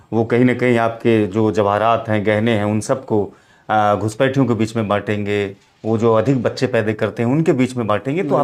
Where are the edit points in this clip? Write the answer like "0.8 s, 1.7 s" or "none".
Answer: none